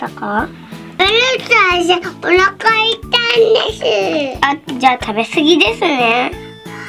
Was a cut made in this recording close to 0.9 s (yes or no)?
yes